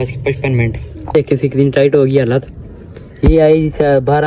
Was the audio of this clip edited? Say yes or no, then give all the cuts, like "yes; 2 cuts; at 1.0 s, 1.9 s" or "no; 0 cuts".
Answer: yes; 1 cut; at 1.1 s